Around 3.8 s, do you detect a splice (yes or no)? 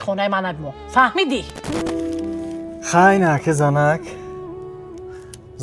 no